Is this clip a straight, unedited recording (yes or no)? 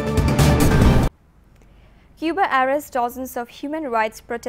yes